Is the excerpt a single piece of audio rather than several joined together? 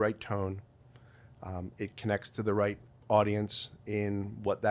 no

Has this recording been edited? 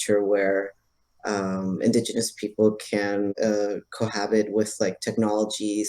yes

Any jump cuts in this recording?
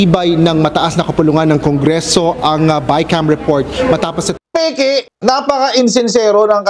yes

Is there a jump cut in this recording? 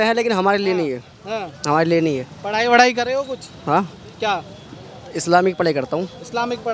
no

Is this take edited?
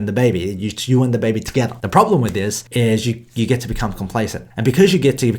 yes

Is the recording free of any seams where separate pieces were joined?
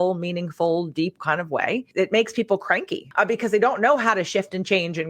no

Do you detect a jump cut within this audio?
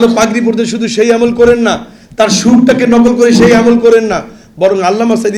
no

